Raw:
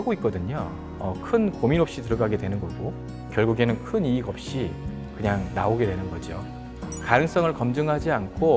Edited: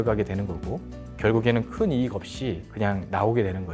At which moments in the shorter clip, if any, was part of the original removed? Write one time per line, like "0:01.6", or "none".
0:02.6